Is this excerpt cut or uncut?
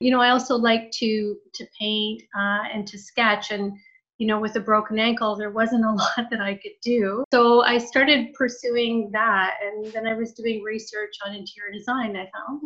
cut